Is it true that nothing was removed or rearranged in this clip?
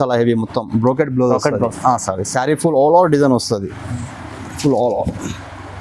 yes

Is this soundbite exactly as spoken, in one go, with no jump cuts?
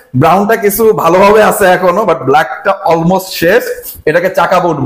yes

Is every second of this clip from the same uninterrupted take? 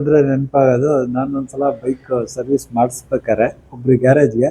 yes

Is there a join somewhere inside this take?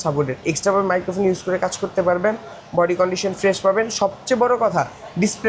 no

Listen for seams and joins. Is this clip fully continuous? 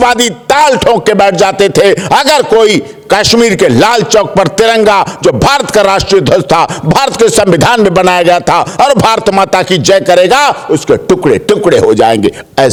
yes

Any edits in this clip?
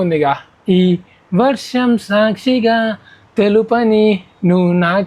no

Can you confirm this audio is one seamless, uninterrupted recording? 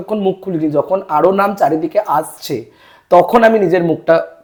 yes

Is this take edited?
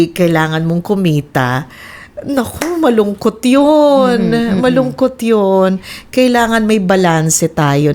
no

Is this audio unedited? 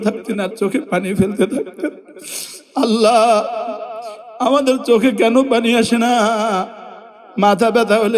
yes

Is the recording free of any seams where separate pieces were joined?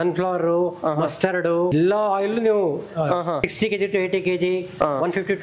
no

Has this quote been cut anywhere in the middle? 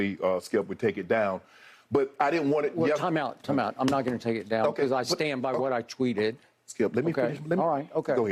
no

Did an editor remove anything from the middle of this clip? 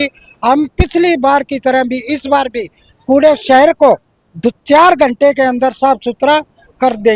no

